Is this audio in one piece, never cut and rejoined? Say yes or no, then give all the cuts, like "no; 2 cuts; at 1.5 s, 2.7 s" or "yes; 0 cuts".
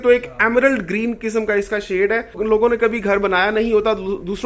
no; 1 cut; at 2.4 s